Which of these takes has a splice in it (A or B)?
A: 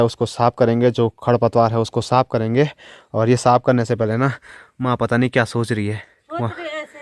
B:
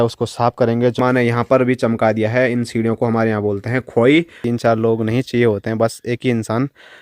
B